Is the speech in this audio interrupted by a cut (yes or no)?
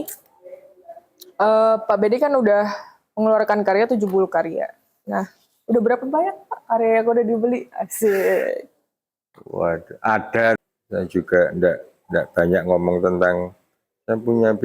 yes